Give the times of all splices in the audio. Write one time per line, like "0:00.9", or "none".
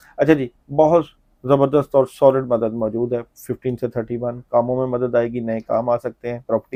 none